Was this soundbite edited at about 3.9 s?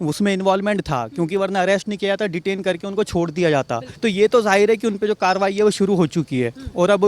no; 0 cuts

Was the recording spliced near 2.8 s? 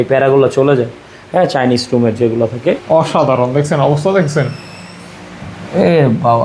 yes; 1 cut; at 2.8 s

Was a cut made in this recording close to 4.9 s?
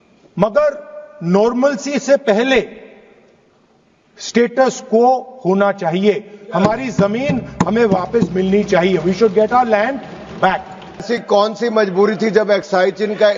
no; 1 cut; at 11.0 s

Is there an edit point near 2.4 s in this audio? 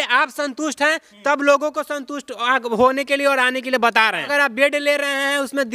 no; 1 cut; at 4.2 s

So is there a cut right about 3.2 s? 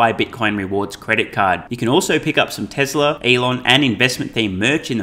yes; 1 cut; at 3.2 s

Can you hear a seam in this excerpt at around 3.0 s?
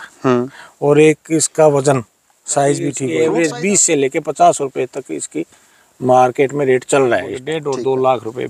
yes; 2 cuts; at 3.0 s, 7.5 s

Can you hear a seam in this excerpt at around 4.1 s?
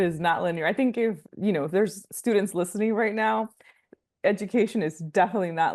no; 1 cut; at 1.3 s

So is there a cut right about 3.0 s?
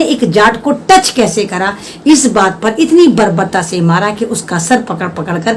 no; 0 cuts

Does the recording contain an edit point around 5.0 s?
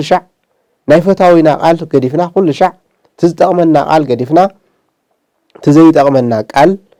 no; 0 cuts

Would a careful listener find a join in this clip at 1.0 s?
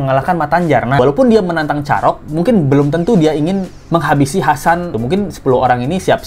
yes; 3 cuts; at 1.0 s, 3.8 s, 4.9 s

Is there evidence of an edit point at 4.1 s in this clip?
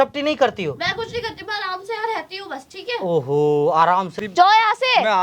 yes; 1 cut; at 4.1 s

